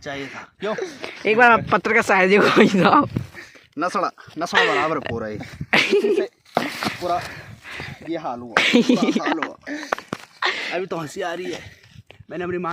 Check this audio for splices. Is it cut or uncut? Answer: uncut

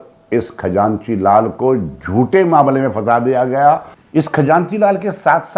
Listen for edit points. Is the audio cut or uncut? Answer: cut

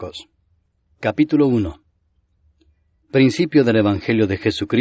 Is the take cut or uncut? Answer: uncut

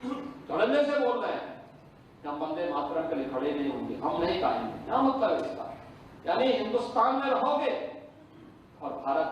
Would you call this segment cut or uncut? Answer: uncut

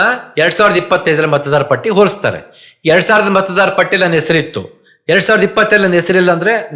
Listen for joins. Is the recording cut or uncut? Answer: uncut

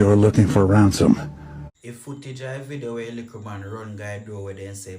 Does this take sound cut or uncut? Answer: cut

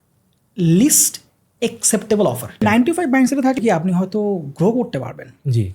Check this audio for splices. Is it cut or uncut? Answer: cut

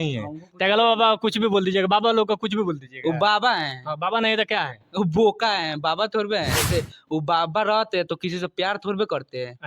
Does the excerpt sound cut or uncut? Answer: cut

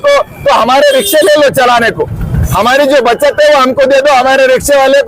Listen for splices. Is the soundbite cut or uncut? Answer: uncut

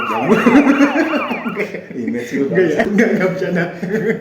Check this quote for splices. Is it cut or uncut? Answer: cut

